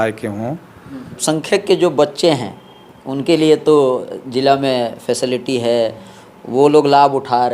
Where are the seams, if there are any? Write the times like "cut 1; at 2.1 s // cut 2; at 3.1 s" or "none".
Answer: cut 1; at 1.2 s